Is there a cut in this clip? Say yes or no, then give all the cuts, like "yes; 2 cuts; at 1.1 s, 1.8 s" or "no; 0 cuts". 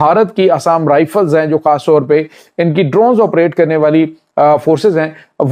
no; 0 cuts